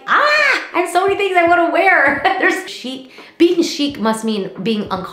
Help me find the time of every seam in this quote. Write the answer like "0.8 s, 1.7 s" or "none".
2.7 s